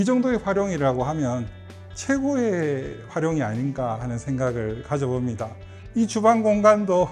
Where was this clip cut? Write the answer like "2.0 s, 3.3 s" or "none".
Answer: 5.7 s

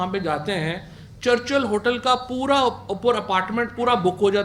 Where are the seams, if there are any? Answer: none

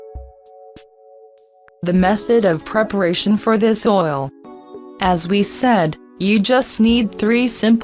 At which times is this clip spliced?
1.1 s

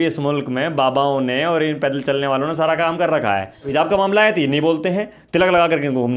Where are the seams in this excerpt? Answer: 3.7 s

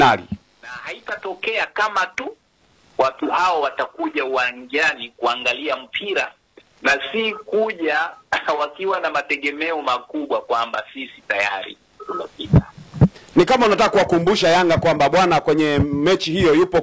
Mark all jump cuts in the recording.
1.0 s

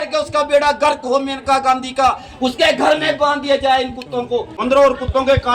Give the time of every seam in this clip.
4.5 s

